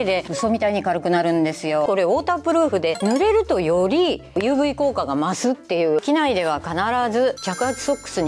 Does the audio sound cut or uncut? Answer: cut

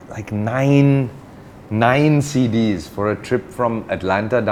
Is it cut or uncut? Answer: uncut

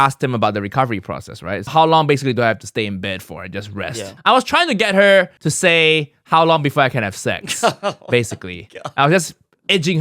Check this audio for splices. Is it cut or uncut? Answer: cut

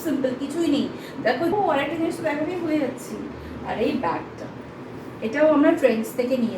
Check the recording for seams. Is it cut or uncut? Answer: cut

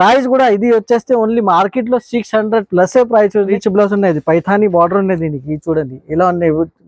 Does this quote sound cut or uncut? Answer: cut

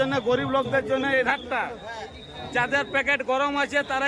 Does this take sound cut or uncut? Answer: uncut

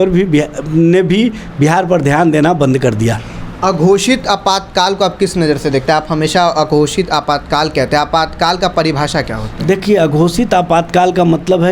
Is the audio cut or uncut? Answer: uncut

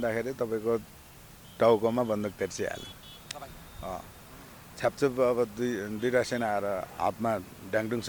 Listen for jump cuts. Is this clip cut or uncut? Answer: uncut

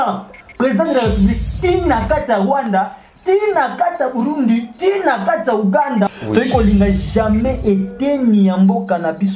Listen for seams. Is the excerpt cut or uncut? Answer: cut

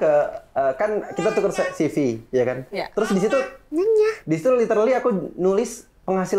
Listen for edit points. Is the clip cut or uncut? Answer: uncut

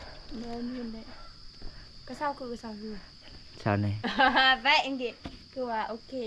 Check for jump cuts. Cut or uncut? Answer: uncut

